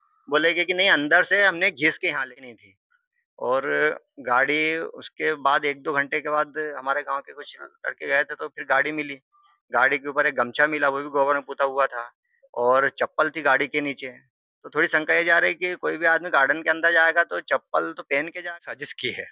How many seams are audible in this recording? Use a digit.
2